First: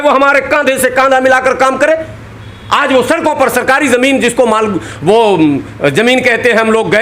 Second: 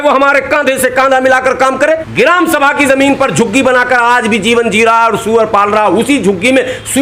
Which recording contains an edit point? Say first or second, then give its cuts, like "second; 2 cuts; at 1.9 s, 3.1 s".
second; 1 cut; at 2.1 s